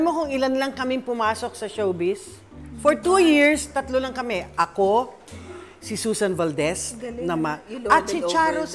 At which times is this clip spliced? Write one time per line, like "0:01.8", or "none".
none